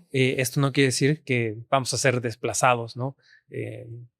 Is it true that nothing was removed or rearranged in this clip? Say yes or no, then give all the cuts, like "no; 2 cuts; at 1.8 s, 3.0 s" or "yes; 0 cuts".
yes; 0 cuts